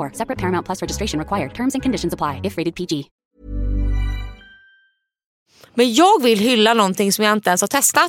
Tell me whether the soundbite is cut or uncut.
cut